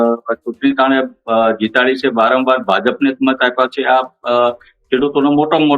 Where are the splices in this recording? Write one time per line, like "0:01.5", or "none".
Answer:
none